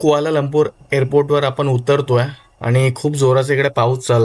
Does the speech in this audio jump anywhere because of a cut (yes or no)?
no